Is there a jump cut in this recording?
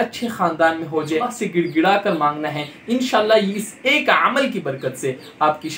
yes; 1 cut; at 1.3 s

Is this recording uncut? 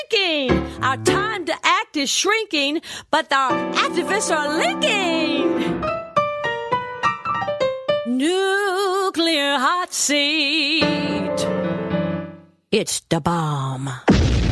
yes; 0 cuts

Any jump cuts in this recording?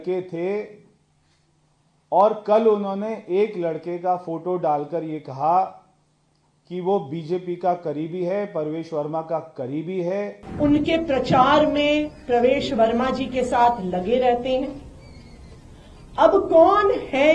yes; 1 cut; at 10.4 s

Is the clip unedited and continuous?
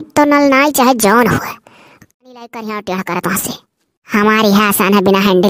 no; 1 cut; at 2.1 s

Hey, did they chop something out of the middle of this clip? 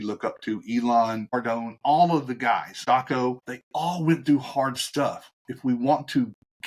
yes; 3 cuts; at 1.2 s, 2.7 s, 3.5 s

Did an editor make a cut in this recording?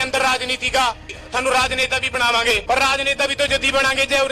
yes; 2 cuts; at 1.0 s, 2.6 s

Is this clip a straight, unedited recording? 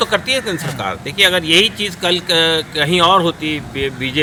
yes; 0 cuts

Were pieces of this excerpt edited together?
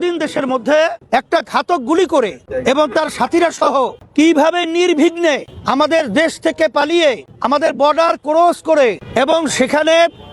yes; 6 cuts; at 1.0 s, 2.4 s, 4.0 s, 5.5 s, 7.3 s, 9.0 s

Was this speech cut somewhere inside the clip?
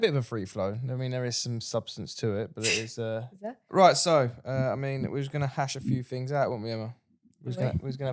yes; 1 cut; at 3.6 s

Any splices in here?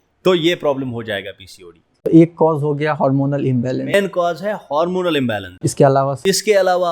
no; 0 cuts

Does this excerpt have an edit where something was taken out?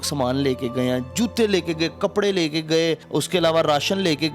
yes; 1 cut; at 3.0 s

